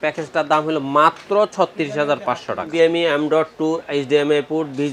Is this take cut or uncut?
cut